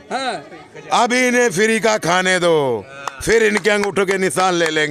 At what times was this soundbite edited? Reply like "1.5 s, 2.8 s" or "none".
none